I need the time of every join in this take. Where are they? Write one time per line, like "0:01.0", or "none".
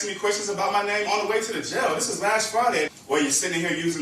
0:02.9